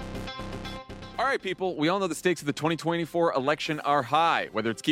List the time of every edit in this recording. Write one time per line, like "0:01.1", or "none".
0:00.9